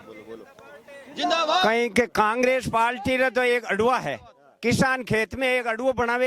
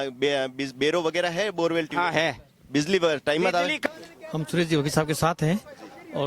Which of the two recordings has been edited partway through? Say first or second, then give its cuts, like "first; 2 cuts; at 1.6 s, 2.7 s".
second; 1 cut; at 3.9 s